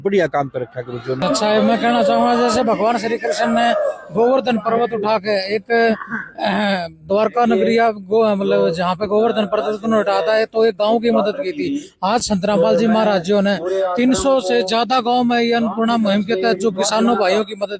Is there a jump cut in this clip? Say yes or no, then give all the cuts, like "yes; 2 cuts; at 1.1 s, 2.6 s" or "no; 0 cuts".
yes; 1 cut; at 1.2 s